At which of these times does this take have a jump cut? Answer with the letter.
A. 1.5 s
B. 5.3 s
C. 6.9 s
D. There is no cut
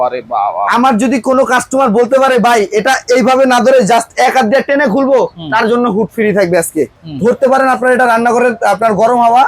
C